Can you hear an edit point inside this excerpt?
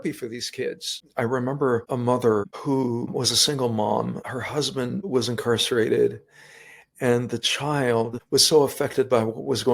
yes; 1 cut; at 1.0 s

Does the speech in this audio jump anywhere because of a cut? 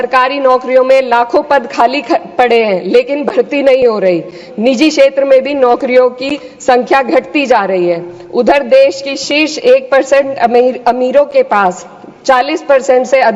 no; 0 cuts

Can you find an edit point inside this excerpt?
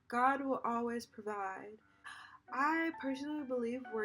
yes; 1 cut; at 2.1 s

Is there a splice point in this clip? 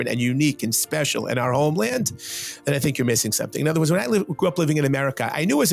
no; 0 cuts

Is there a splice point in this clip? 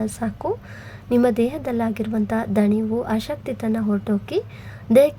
no; 0 cuts

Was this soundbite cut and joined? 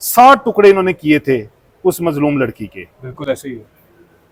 no; 0 cuts

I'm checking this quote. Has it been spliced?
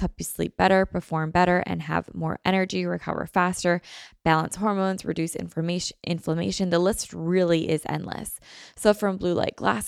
no; 0 cuts

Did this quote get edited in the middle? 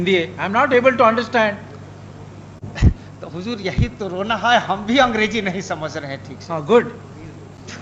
no; 0 cuts

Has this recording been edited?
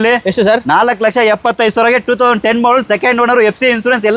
no; 0 cuts

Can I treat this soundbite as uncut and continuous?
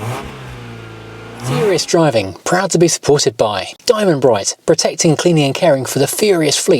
no; 1 cut; at 1.5 s

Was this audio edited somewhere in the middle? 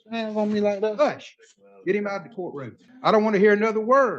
yes; 1 cut; at 2.8 s

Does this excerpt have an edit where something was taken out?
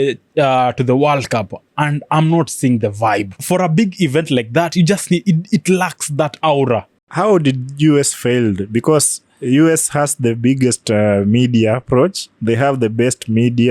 yes; 2 cuts; at 3.3 s, 7.0 s

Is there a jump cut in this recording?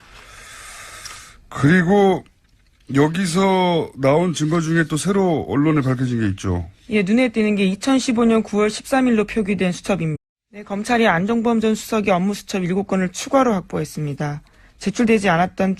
no; 0 cuts

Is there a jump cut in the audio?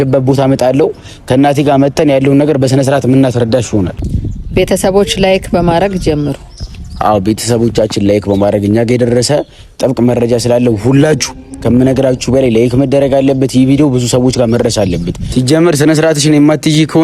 yes; 2 cuts; at 3.9 s, 15.2 s

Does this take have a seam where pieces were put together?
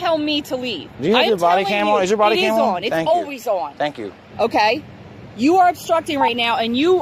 no; 0 cuts

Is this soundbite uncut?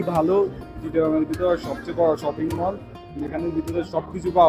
yes; 0 cuts

